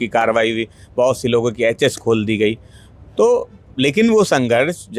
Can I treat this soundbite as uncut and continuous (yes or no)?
yes